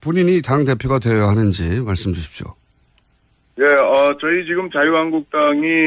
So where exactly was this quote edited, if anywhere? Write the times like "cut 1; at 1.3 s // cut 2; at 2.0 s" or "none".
none